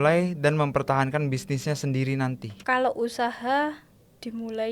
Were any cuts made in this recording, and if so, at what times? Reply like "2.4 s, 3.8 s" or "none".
2.5 s